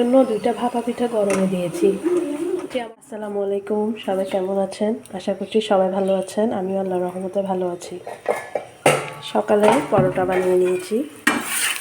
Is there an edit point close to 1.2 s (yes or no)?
no